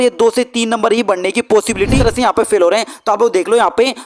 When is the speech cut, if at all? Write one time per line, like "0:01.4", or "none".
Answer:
0:02.0

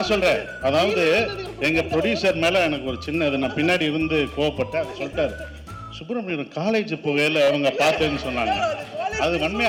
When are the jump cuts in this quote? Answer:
none

